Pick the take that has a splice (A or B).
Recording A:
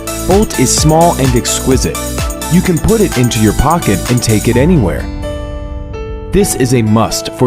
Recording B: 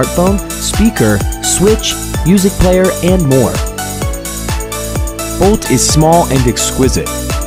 A